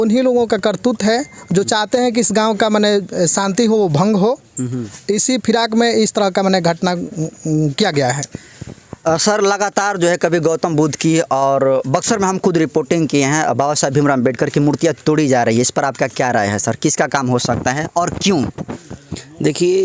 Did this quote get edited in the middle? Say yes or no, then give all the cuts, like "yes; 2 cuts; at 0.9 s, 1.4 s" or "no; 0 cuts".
no; 0 cuts